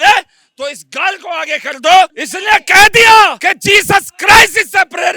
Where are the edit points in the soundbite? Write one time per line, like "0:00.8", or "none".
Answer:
0:02.2
0:03.4